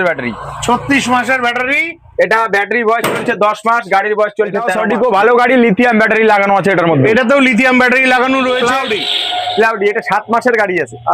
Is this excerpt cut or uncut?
cut